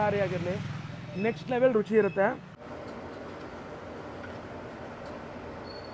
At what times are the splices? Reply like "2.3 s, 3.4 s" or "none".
2.6 s